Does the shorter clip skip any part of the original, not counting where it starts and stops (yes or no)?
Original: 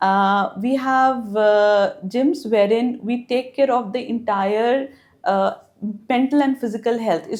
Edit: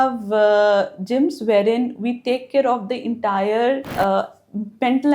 yes